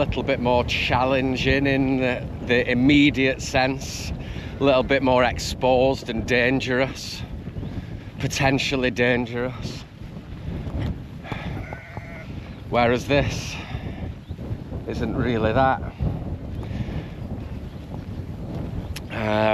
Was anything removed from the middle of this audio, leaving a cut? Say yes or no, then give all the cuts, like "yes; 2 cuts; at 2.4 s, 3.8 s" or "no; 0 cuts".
no; 0 cuts